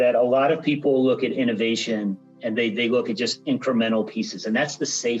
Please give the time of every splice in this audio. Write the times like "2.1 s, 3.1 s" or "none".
none